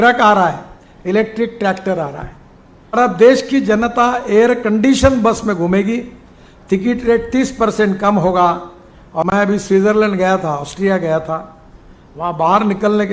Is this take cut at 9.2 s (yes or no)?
yes